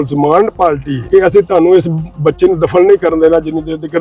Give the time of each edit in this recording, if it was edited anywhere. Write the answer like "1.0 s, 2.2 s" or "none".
0.9 s